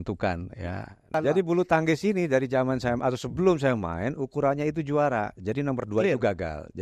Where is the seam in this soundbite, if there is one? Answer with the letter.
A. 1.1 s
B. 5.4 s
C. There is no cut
A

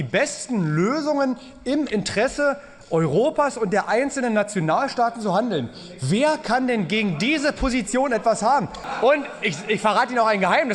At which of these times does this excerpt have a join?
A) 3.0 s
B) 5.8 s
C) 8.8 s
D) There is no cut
C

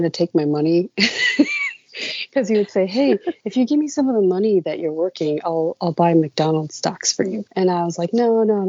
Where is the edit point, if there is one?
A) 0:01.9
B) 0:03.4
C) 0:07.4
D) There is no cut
C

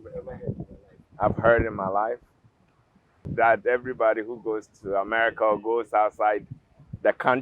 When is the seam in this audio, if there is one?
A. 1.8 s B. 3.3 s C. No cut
B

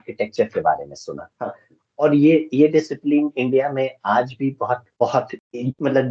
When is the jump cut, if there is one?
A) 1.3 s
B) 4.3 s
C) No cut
C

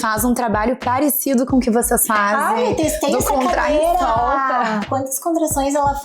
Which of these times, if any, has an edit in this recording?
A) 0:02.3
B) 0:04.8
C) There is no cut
B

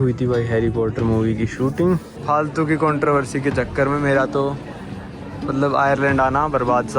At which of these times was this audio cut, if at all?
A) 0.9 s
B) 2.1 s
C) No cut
B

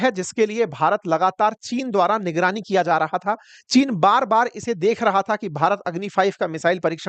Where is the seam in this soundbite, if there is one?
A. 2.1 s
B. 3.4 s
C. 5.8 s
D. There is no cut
D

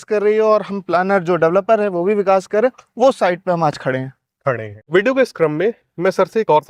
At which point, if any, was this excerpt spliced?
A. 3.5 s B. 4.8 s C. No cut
C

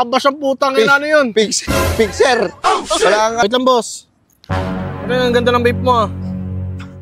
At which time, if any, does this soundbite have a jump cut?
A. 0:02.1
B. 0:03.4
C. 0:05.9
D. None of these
B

